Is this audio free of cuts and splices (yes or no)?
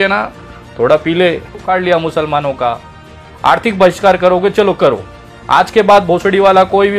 no